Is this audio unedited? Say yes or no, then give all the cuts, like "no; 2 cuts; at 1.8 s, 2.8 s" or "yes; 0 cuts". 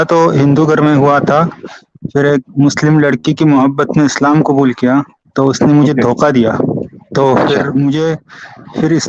yes; 0 cuts